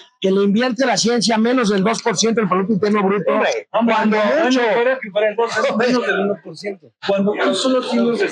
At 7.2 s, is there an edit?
yes; 1 cut; at 7.2 s

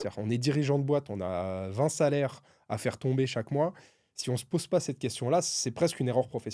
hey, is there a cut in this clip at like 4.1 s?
no; 0 cuts

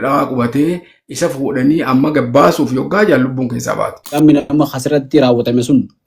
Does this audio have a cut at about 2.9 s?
no; 1 cut; at 4.2 s

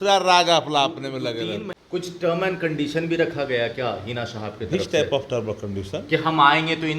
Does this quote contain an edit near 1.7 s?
yes; 1 cut; at 1.7 s

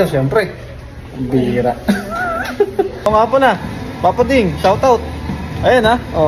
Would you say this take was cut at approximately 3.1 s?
yes; 1 cut; at 3.1 s

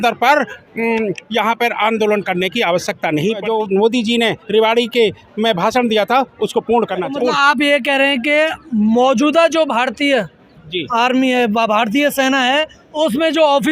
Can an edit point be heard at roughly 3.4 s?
yes; 2 cuts; at 3.4 s, 7.1 s

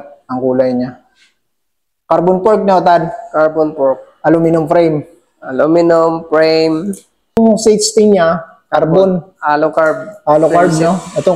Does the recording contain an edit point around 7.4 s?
yes; 1 cut; at 7.4 s

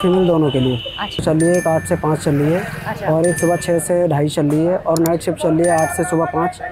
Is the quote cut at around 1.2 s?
yes; 1 cut; at 1.2 s

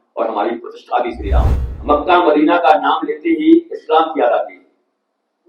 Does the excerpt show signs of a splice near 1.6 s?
yes; 1 cut; at 1.6 s

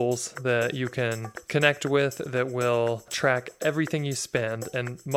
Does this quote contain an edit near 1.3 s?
yes; 2 cuts; at 1.3 s, 3.1 s

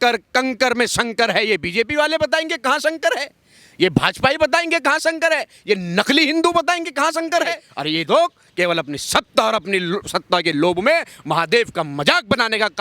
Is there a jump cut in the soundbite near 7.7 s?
yes; 1 cut; at 7.7 s

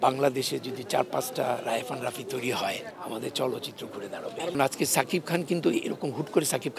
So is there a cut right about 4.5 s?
yes; 2 cuts; at 2.9 s, 4.5 s

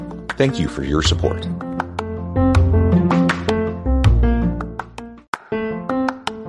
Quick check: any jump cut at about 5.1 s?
yes; 1 cut; at 5.1 s

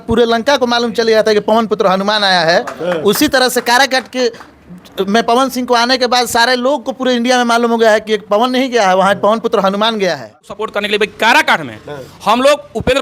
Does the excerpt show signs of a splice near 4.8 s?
no; 1 cut; at 10.6 s

